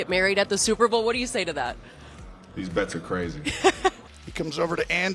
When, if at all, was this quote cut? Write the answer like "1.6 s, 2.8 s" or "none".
4.0 s